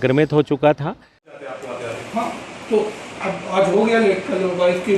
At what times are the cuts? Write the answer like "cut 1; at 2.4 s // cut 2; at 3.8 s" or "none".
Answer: cut 1; at 1.3 s